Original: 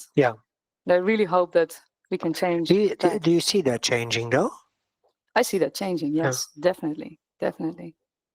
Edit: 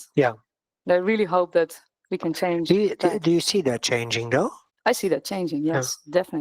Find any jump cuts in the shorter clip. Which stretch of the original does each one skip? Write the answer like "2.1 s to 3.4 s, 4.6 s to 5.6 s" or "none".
4.7 s to 5.1 s